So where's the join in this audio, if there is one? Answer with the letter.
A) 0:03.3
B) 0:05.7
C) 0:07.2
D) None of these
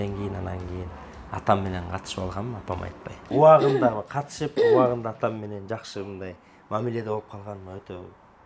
A